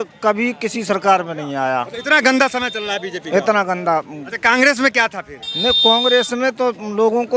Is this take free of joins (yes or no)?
yes